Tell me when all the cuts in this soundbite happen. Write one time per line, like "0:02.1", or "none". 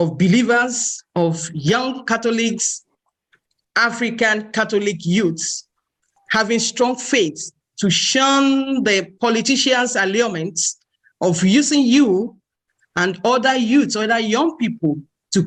none